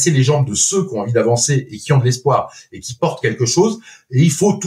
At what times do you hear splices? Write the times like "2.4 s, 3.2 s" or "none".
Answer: none